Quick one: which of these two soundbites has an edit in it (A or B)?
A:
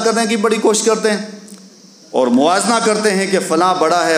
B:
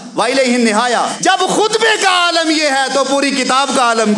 B